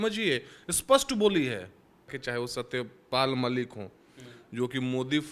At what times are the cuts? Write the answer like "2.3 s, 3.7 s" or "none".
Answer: 2.2 s